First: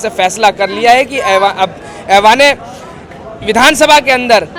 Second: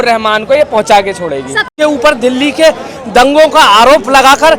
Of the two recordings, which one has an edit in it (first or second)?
second